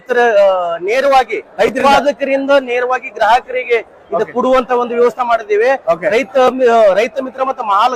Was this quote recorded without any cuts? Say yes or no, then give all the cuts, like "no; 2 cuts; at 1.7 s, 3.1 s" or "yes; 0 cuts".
yes; 0 cuts